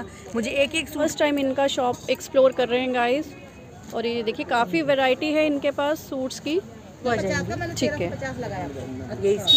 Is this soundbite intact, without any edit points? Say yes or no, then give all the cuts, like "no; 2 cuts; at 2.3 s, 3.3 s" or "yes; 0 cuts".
no; 2 cuts; at 1.0 s, 7.0 s